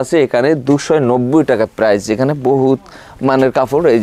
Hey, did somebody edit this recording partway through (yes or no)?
no